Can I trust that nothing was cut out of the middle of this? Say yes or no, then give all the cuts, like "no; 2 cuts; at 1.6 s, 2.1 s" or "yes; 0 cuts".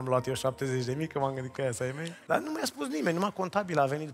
no; 1 cut; at 2.1 s